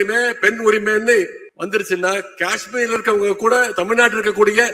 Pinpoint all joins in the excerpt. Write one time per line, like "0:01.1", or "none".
0:01.4